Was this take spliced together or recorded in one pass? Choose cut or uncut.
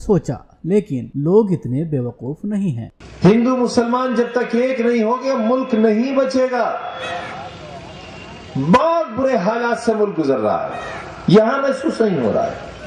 uncut